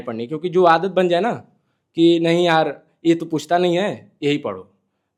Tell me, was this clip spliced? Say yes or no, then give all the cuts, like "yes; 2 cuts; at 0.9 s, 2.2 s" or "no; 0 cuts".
no; 0 cuts